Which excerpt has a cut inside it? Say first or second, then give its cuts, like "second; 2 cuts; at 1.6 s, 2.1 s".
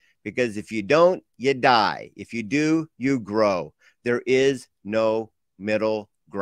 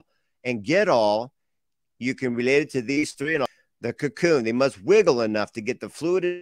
second; 1 cut; at 3.5 s